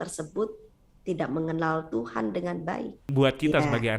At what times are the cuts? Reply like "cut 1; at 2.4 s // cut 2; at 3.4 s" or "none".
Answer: cut 1; at 3.0 s